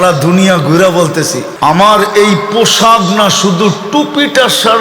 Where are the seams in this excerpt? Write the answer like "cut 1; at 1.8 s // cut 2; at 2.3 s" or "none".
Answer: cut 1; at 1.4 s